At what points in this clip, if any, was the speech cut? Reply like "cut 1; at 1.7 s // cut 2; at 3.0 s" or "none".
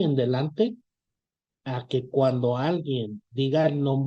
none

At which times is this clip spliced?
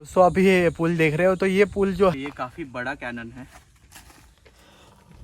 cut 1; at 2.2 s

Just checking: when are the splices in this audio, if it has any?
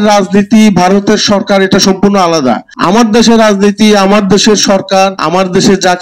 cut 1; at 2.7 s // cut 2; at 5.2 s

